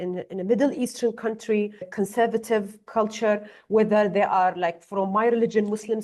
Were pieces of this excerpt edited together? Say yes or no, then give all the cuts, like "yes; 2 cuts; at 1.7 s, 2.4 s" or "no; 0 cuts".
yes; 1 cut; at 1.9 s